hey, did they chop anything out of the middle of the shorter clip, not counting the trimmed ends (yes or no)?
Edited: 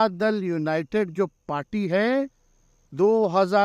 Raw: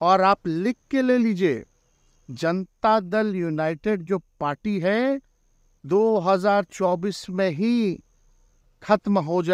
no